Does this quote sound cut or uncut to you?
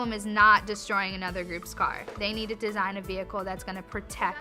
cut